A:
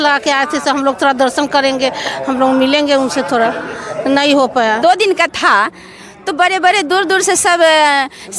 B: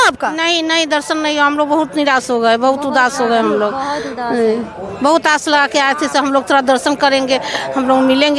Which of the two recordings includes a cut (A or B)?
A